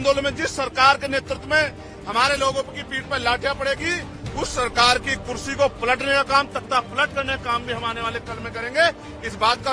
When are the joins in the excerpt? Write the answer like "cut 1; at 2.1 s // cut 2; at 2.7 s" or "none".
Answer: none